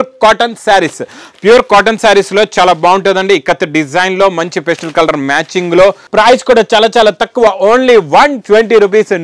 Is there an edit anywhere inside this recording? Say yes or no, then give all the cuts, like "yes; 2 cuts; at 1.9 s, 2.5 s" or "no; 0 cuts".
yes; 1 cut; at 6.0 s